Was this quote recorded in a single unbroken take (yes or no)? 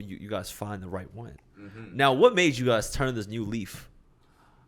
yes